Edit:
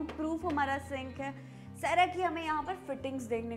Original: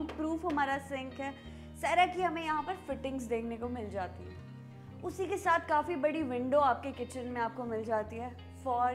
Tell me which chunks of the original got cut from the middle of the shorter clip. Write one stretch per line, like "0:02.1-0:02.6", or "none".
none